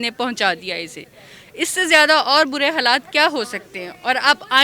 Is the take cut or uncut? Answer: uncut